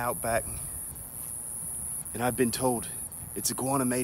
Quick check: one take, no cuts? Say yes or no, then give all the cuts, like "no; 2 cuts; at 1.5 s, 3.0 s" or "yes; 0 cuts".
yes; 0 cuts